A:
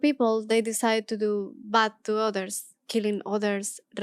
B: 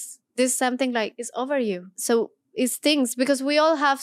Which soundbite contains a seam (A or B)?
B